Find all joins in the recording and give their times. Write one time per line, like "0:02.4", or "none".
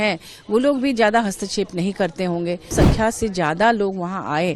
0:02.7